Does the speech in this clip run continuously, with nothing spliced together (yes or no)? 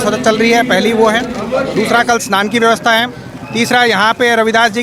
yes